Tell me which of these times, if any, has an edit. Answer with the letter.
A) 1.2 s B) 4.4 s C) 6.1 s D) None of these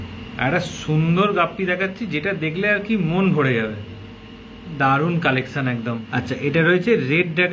C